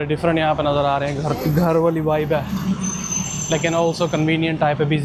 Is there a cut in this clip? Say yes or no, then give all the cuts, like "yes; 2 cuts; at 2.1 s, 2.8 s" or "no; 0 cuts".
no; 0 cuts